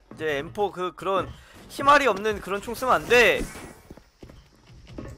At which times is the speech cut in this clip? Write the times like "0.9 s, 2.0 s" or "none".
none